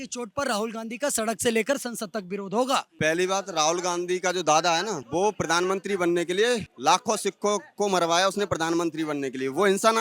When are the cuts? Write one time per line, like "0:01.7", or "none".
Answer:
0:02.9
0:06.7